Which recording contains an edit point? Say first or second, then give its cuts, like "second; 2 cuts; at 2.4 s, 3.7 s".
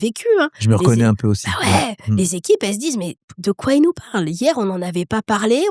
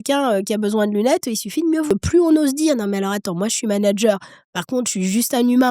second; 1 cut; at 1.9 s